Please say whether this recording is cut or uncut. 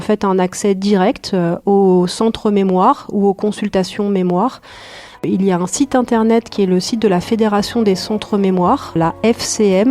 cut